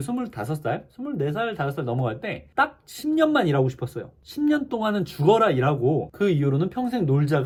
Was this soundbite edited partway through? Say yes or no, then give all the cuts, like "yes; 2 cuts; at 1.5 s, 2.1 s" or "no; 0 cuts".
no; 0 cuts